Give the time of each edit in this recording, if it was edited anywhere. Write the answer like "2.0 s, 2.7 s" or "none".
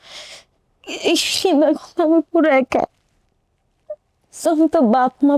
4.4 s